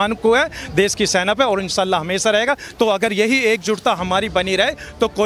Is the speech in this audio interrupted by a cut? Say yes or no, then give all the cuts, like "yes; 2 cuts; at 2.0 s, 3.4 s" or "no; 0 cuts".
yes; 1 cut; at 2.7 s